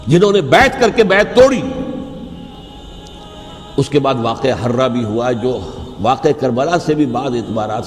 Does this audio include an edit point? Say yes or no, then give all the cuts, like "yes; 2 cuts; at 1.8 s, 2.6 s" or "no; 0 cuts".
yes; 1 cut; at 2.6 s